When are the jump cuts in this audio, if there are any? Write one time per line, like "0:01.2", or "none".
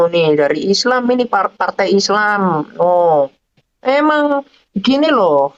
none